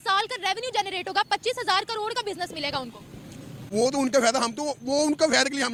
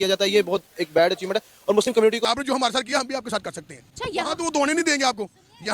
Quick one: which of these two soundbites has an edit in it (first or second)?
second